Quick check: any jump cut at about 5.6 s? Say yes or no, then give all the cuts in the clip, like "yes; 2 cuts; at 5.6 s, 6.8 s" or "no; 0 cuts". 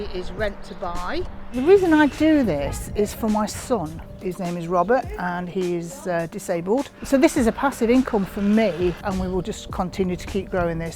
no; 3 cuts; at 1.4 s, 7.0 s, 9.0 s